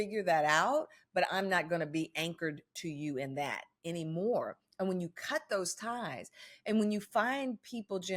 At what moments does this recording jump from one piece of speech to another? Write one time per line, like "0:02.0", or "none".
none